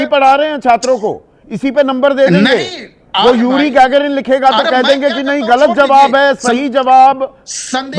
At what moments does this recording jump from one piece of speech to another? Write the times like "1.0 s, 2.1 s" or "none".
2.5 s